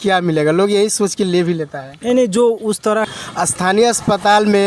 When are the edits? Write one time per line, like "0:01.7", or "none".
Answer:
0:03.1